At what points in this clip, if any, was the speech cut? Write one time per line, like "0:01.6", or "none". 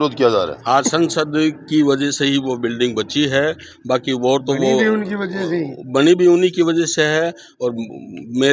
none